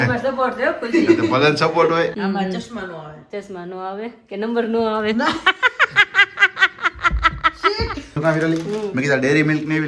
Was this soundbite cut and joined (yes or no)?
yes